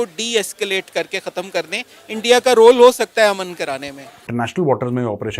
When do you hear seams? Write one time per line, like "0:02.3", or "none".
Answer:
0:04.3